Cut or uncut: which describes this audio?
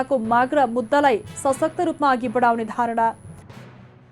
uncut